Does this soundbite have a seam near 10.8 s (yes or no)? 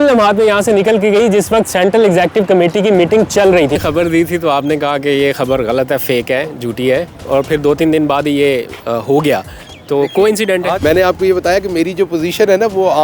yes